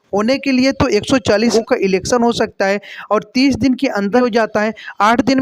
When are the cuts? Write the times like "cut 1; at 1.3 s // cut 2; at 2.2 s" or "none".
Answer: cut 1; at 1.5 s // cut 2; at 4.2 s